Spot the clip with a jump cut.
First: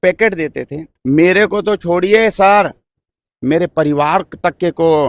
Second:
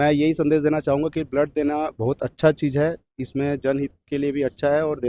first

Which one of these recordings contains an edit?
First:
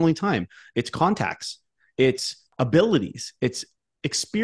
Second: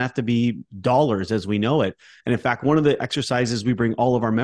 first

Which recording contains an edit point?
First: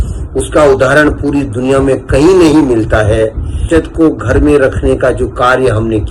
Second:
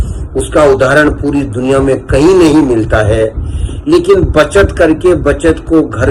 first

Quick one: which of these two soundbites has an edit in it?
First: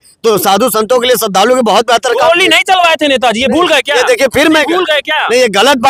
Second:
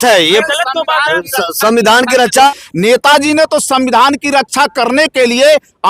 second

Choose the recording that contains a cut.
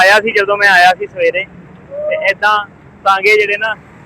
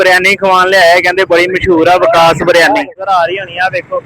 second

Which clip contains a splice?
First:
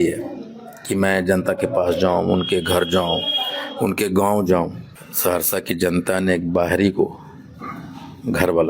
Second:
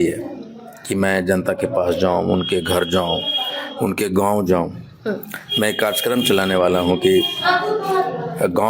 first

